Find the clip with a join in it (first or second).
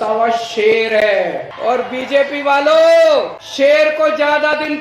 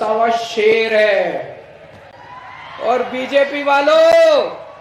first